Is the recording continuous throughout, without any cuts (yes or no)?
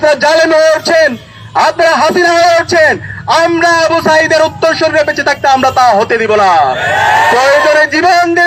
yes